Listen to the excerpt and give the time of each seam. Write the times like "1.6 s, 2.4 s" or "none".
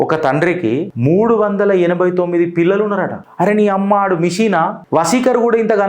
0.9 s, 3.2 s, 4.8 s